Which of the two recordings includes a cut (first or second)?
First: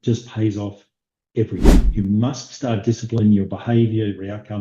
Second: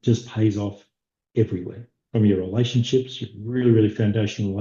first